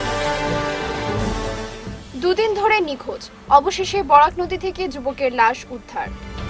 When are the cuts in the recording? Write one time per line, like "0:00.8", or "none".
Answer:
0:01.2